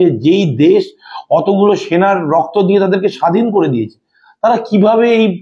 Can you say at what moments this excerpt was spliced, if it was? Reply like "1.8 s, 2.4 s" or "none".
none